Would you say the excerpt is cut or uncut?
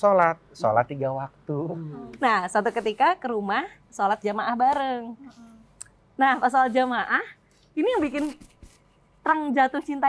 cut